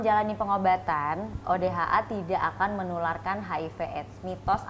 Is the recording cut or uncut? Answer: uncut